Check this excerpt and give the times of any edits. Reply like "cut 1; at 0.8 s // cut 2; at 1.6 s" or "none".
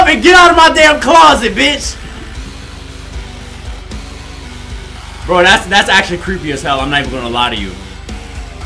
none